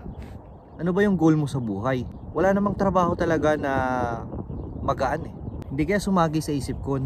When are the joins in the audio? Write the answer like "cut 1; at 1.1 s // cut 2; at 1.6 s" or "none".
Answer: cut 1; at 2.2 s // cut 2; at 5.6 s